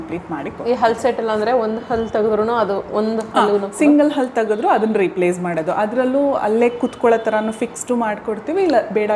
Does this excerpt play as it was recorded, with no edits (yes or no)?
yes